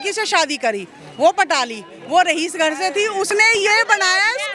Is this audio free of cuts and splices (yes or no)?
yes